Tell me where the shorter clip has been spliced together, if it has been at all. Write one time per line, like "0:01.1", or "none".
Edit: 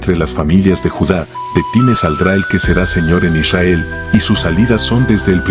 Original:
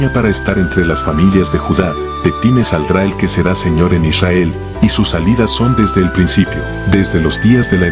none